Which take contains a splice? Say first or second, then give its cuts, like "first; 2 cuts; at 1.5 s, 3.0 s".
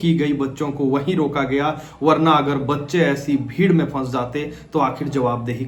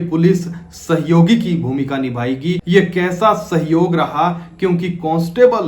second; 1 cut; at 2.6 s